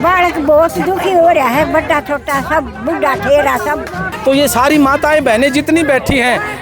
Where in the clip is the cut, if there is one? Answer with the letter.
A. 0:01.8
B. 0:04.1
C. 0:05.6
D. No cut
B